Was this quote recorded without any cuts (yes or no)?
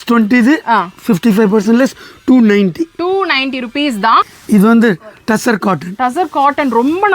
no